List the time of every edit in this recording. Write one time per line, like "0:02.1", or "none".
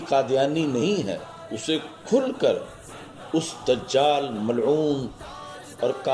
0:01.5